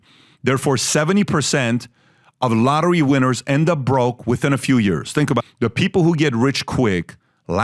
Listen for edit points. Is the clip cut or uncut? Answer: cut